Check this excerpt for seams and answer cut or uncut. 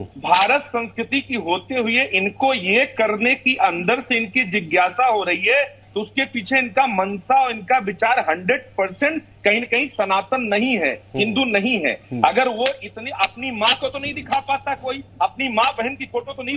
uncut